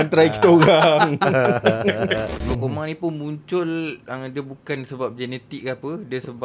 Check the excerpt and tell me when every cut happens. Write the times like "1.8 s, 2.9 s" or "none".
2.3 s

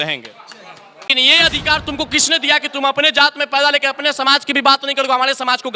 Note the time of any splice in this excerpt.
1.1 s

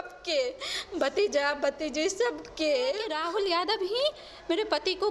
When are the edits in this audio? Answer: 3.1 s

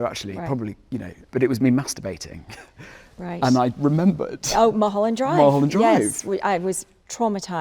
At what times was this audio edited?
none

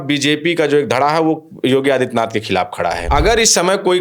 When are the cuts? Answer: 3.0 s

